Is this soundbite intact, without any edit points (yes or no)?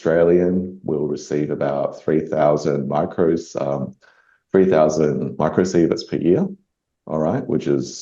yes